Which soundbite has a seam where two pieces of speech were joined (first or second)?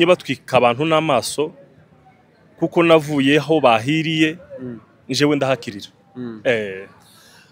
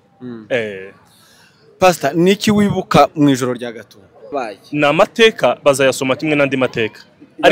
second